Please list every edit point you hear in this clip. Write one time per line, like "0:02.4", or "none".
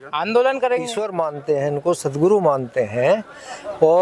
0:01.0